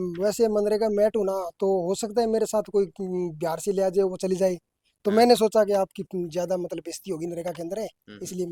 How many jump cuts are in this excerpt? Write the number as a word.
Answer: zero